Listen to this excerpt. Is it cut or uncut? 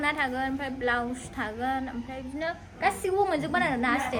uncut